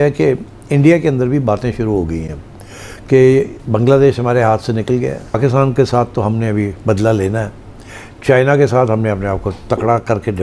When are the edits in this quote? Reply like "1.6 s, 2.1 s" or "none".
5.4 s

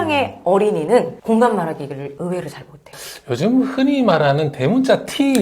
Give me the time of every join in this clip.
none

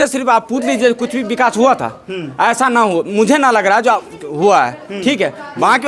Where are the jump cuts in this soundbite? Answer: none

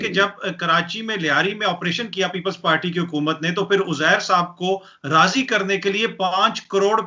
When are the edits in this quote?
none

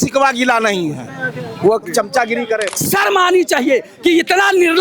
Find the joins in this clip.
2.7 s

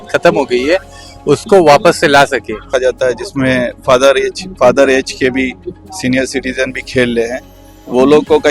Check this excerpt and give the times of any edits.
2.7 s

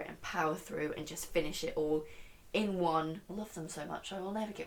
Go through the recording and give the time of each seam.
3.2 s

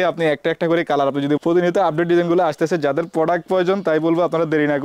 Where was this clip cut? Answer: 1.4 s

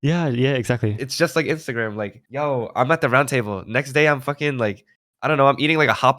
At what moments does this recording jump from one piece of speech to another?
1.0 s

